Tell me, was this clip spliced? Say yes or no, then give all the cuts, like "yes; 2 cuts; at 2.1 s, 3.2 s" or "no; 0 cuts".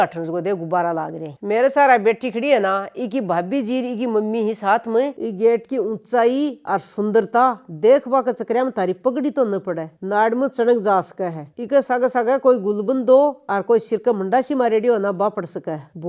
no; 0 cuts